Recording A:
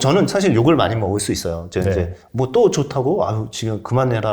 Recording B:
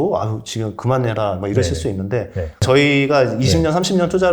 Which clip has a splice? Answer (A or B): B